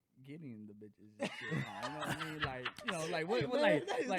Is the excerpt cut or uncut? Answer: uncut